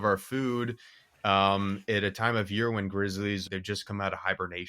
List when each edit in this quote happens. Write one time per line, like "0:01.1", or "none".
0:03.4